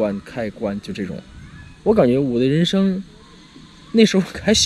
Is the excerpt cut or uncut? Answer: uncut